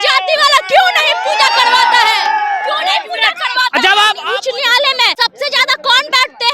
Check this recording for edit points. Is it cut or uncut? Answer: cut